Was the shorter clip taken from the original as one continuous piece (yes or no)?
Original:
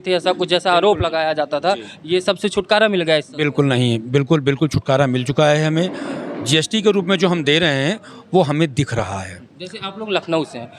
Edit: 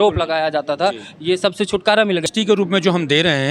no